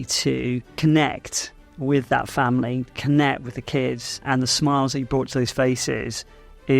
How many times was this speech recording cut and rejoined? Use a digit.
2